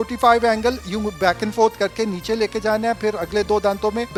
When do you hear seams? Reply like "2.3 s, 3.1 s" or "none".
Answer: none